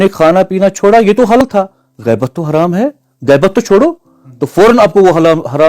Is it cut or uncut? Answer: cut